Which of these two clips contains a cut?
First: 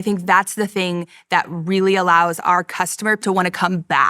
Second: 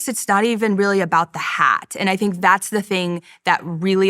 first; 1 cut; at 3.2 s

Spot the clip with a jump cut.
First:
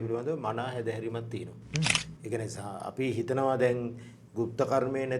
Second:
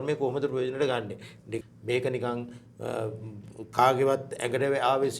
second; 1 cut; at 1.5 s

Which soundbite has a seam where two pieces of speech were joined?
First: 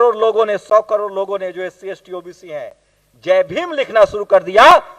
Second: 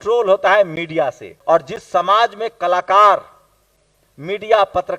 second; 1 cut; at 1.3 s

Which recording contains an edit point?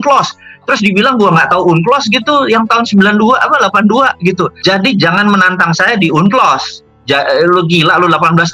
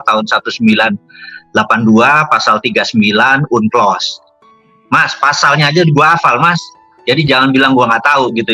first; 1 cut; at 4.5 s

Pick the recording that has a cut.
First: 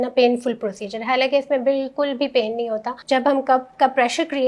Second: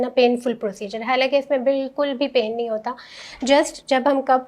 first; 1 cut; at 3.0 s

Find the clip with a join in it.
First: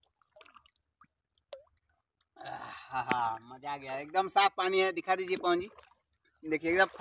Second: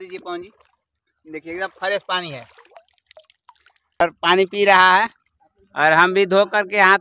second; 1 cut; at 4.0 s

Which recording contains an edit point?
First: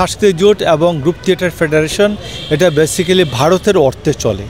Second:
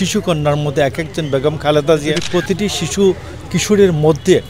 second; 1 cut; at 2.2 s

